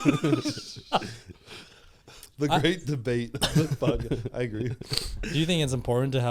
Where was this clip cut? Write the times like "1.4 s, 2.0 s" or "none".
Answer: none